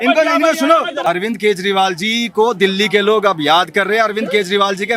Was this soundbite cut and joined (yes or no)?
yes